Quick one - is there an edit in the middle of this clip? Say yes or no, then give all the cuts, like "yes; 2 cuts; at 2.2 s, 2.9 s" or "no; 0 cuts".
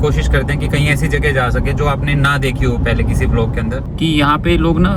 yes; 1 cut; at 3.8 s